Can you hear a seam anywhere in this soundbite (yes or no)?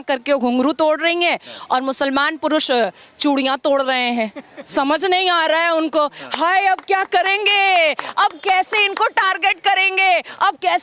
no